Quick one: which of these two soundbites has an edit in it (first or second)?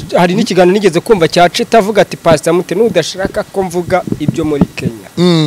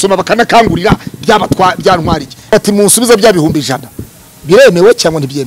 second